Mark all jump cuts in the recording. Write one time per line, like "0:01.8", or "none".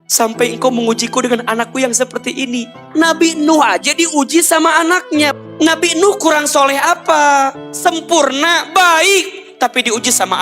0:02.7
0:05.3
0:07.7